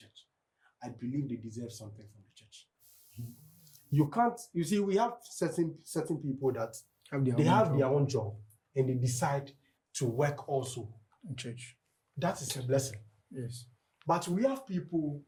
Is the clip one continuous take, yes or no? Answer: yes